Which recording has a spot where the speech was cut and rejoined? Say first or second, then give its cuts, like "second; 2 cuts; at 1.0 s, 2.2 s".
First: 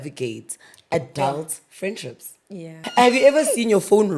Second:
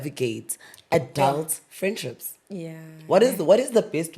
first; 1 cut; at 2.8 s